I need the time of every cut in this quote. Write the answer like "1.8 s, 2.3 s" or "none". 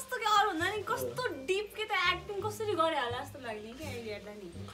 none